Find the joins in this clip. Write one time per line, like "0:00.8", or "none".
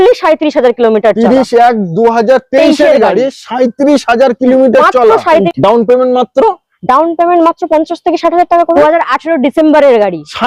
0:05.5
0:08.8